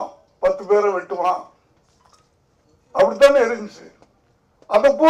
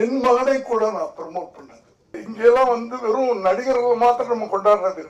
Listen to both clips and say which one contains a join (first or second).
second